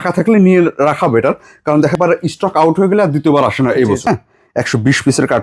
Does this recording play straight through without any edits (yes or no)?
no